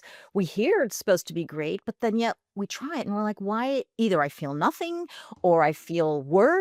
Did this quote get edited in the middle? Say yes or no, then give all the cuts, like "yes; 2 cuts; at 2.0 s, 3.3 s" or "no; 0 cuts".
no; 0 cuts